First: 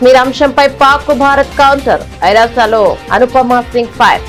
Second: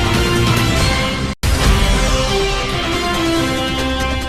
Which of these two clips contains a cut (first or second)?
second